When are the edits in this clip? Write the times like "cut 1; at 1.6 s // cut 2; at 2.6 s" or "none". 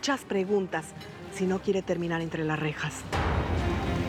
none